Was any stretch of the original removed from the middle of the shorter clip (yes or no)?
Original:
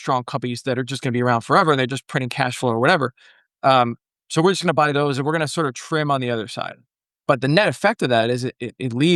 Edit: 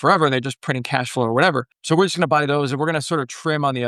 yes